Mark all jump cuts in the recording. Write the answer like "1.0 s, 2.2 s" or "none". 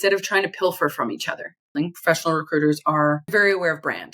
1.7 s, 3.3 s